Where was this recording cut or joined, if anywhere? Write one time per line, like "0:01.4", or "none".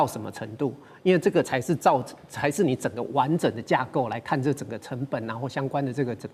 none

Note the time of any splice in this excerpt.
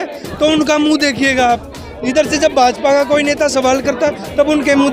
none

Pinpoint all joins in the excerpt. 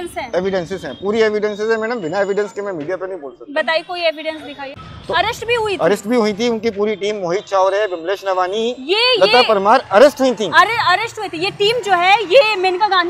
0:04.6

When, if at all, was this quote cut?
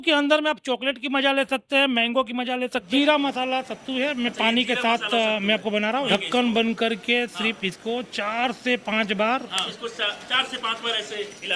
0:02.9
0:06.1
0:09.7

